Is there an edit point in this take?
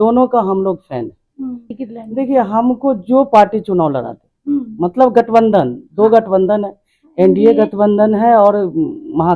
yes; 1 cut; at 1.7 s

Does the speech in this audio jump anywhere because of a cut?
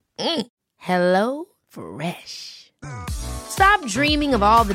no; 0 cuts

